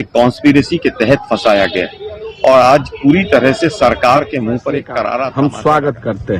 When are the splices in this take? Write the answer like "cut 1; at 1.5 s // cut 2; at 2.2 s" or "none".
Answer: cut 1; at 5.3 s

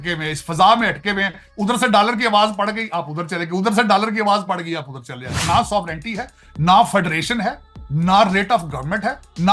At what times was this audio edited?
cut 1; at 5.4 s

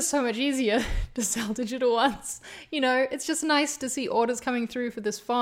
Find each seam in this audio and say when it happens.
none

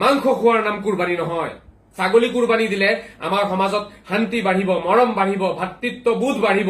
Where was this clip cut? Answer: cut 1; at 1.8 s

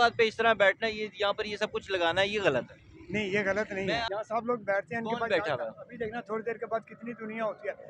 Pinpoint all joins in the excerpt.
cut 1; at 4.1 s

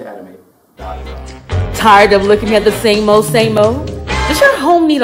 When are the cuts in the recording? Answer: cut 1; at 1.0 s

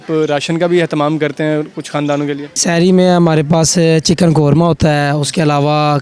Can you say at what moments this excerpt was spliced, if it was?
cut 1; at 2.5 s

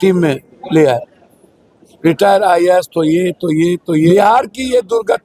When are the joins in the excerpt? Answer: cut 1; at 4.1 s

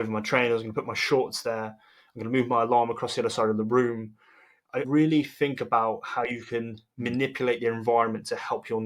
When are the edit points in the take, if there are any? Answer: cut 1; at 4.9 s

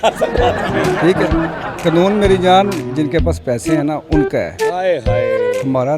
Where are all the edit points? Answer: cut 1; at 1.7 s

